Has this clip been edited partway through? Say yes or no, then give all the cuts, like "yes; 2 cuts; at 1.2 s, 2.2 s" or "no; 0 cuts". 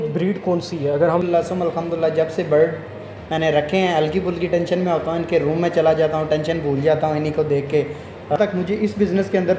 yes; 2 cuts; at 1.3 s, 8.4 s